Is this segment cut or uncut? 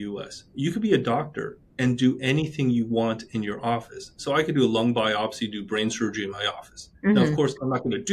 uncut